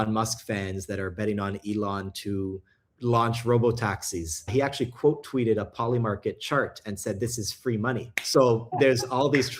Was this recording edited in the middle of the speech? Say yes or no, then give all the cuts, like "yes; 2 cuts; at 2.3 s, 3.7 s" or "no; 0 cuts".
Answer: yes; 3 cuts; at 2.9 s, 4.5 s, 8.1 s